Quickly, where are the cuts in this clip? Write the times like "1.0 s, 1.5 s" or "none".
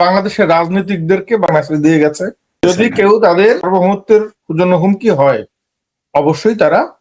1.5 s, 2.6 s, 3.6 s